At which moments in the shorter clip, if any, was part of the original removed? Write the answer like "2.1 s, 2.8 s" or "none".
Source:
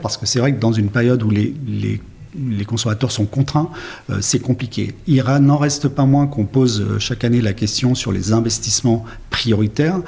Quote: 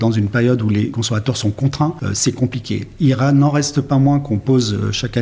0.9 s, 2.1 s